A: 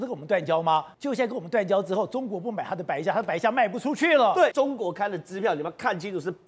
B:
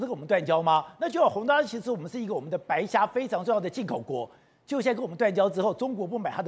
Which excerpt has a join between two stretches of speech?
A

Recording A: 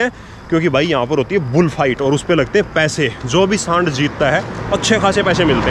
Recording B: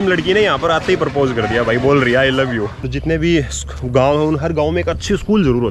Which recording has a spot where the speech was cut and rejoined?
B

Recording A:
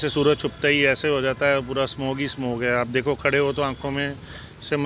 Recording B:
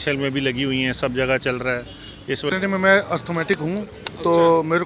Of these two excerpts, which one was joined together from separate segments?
B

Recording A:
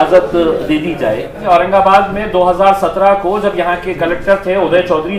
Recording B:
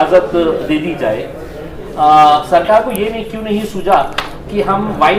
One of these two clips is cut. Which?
A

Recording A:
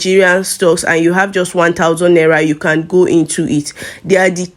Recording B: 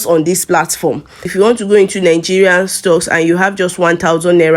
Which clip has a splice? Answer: B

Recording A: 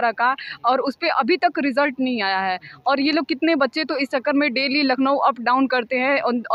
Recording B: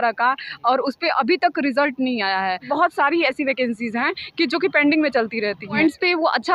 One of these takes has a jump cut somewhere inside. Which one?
B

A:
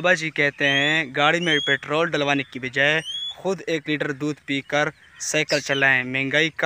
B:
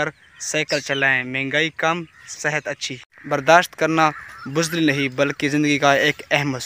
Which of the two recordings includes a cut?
B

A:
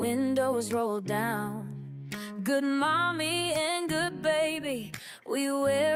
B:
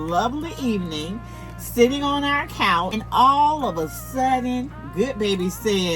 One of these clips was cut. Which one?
B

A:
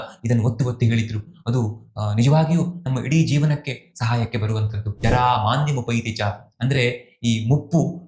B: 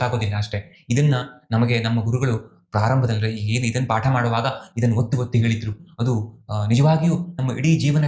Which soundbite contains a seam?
A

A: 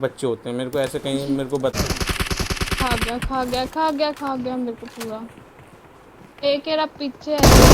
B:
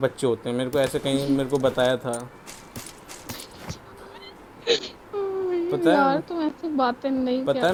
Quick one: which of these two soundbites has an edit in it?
A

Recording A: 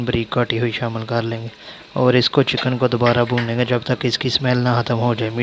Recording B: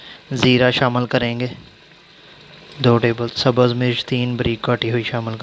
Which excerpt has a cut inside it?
B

